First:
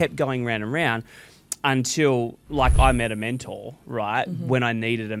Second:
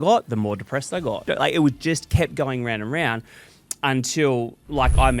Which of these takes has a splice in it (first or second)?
second